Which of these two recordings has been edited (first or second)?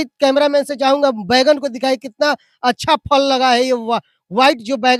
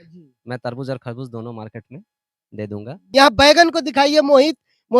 second